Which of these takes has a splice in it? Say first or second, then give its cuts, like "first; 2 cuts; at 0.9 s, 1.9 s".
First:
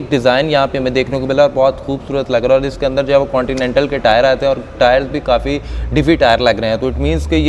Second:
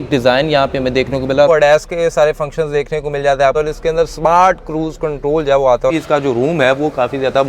second; 3 cuts; at 1.5 s, 3.5 s, 5.9 s